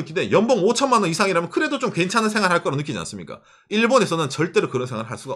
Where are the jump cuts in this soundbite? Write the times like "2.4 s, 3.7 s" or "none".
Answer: none